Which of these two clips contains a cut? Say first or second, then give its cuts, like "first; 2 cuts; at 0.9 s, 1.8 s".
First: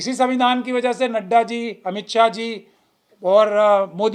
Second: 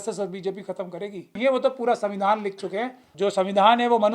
second; 2 cuts; at 1.3 s, 3.1 s